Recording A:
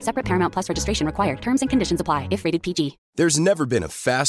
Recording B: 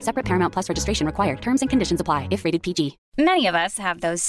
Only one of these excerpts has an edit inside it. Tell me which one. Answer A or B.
B